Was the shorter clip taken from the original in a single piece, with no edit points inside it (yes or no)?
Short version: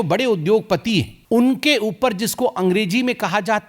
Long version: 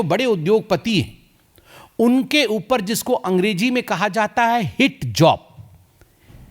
no